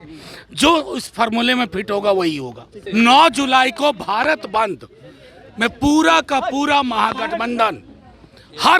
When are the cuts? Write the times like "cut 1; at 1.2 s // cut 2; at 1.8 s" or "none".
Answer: cut 1; at 2.7 s